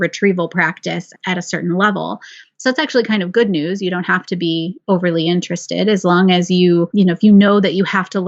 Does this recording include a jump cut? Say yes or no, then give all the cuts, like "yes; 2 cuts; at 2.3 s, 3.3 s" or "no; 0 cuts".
yes; 2 cuts; at 1.1 s, 6.9 s